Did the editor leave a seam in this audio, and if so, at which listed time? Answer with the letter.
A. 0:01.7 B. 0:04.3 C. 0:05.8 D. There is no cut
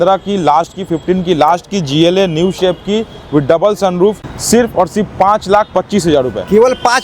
B